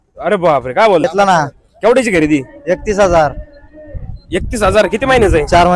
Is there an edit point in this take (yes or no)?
yes